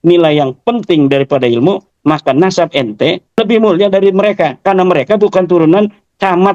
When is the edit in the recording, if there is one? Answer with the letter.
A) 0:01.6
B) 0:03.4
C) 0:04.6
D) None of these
B